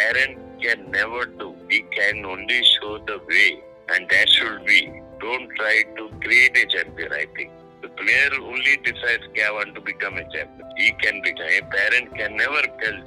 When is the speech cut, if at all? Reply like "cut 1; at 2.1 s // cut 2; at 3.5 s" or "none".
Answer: cut 1; at 7.5 s